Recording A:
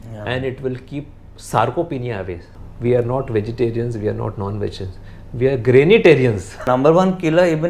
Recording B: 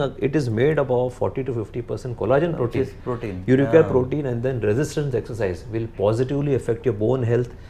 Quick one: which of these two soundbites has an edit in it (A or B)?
A